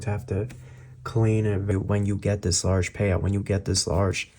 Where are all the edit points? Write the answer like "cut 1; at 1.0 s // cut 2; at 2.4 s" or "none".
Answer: cut 1; at 1.7 s